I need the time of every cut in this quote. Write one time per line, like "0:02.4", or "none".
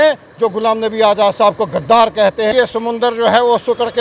0:02.5

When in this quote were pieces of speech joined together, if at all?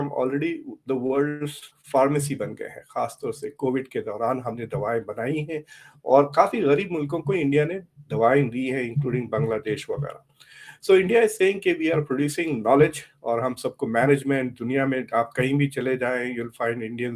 none

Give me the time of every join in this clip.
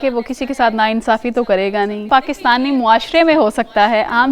0:02.1

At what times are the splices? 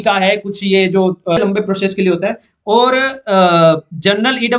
0:01.4

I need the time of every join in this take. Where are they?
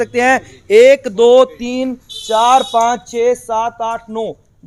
none

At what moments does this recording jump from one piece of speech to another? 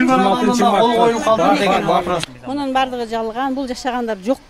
0:02.2

